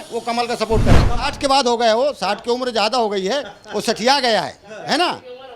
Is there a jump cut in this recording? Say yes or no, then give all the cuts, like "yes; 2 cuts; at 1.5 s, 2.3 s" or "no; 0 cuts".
yes; 1 cut; at 1.1 s